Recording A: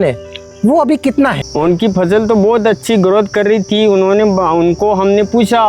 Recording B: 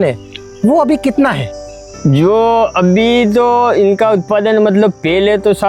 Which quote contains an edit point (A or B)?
A